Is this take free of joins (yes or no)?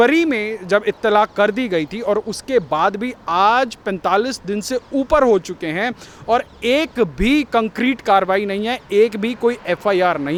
yes